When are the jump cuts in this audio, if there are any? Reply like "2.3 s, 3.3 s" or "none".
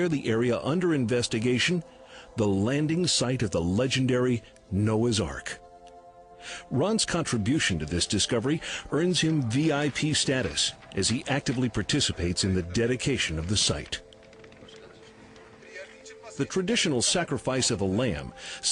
14.2 s